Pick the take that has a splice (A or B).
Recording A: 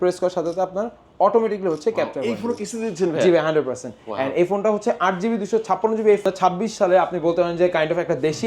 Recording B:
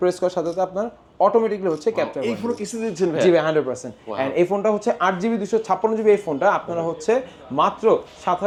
A